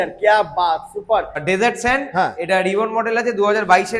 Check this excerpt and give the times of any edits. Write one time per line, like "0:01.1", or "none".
0:01.4